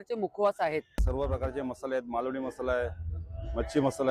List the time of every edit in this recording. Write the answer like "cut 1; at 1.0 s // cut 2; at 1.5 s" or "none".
cut 1; at 1.0 s